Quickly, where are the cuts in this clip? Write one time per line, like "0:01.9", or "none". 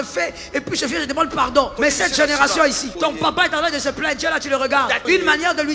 0:01.8
0:02.9
0:05.0